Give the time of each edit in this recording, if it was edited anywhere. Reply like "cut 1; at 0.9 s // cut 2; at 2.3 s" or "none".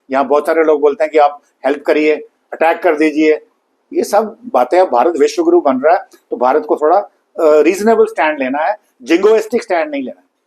none